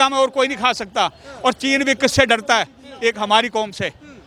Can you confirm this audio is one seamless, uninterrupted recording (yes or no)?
yes